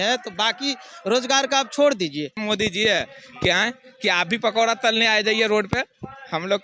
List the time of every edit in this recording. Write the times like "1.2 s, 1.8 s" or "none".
2.4 s